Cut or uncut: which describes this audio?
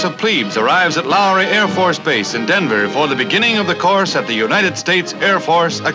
uncut